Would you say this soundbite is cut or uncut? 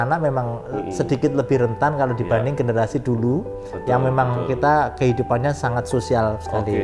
uncut